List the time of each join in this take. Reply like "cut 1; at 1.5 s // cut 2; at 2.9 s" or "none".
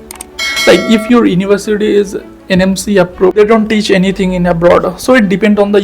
cut 1; at 3.4 s

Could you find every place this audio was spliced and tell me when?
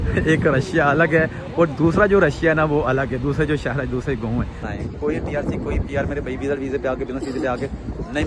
cut 1; at 4.7 s

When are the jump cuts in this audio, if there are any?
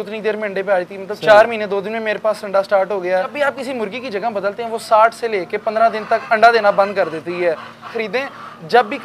cut 1; at 3.3 s // cut 2; at 7.9 s

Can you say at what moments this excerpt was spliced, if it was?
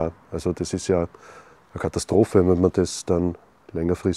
none

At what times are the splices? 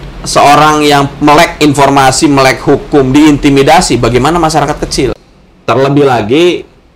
cut 1; at 5.2 s

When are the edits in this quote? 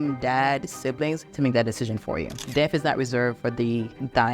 cut 1; at 1.3 s // cut 2; at 2.4 s

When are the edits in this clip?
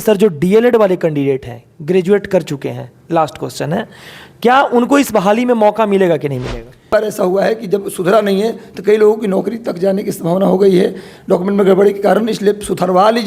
cut 1; at 6.9 s

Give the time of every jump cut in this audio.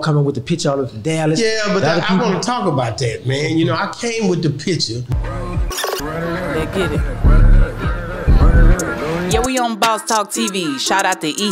none

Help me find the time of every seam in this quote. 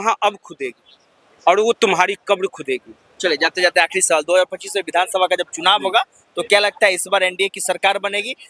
none

